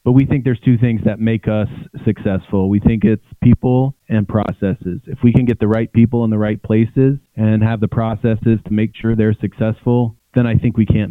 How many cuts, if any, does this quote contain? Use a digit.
3